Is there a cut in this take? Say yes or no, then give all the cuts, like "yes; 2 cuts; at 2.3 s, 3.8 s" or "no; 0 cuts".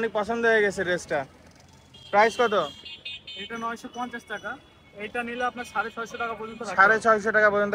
no; 0 cuts